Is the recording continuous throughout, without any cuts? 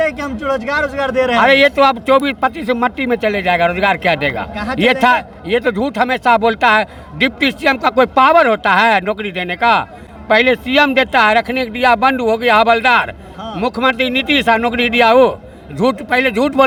yes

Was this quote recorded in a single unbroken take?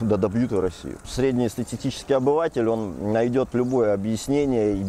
no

